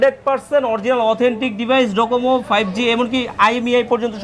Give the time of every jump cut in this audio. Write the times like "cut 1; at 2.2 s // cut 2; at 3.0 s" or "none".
none

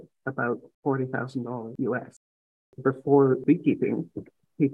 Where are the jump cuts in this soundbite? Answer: cut 1; at 1.7 s // cut 2; at 2.7 s // cut 3; at 3.4 s

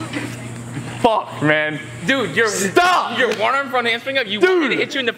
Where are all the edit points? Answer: cut 1; at 0.9 s

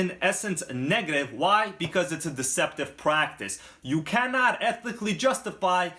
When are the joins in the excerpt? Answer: none

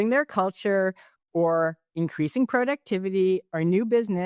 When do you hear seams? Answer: none

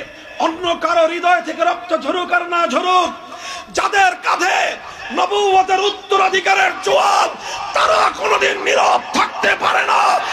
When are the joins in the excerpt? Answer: none

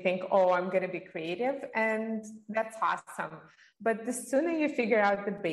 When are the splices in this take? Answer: none

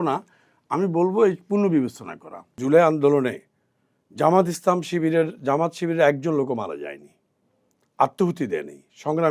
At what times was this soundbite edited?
cut 1; at 2.5 s

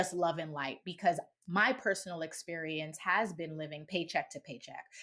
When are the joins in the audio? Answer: cut 1; at 3.8 s

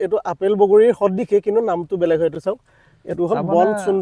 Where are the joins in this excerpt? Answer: none

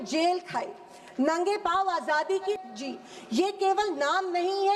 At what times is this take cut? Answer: cut 1; at 2.5 s

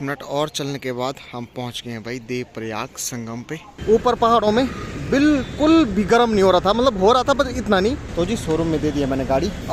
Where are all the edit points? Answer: cut 1; at 3.7 s // cut 2; at 8.0 s

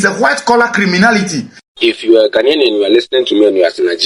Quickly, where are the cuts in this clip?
cut 1; at 1.6 s

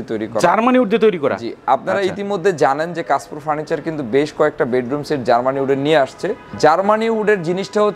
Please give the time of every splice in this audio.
none

